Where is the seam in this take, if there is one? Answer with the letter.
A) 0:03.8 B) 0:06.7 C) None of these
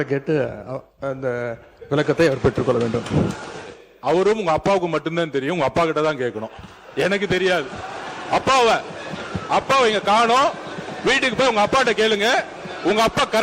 A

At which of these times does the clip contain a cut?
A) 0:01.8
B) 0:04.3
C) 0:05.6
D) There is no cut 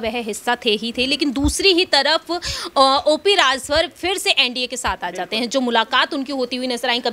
D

